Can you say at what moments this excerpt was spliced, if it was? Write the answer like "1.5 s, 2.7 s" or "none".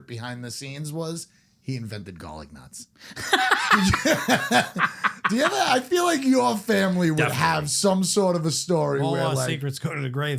none